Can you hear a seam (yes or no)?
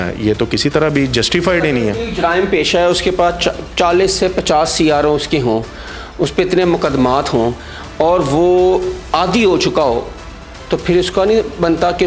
no